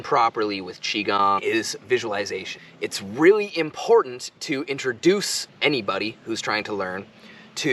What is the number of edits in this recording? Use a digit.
1